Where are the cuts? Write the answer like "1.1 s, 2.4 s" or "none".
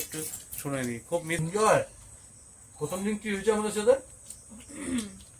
1.4 s